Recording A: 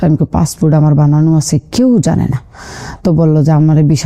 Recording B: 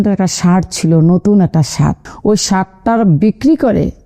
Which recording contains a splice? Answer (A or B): B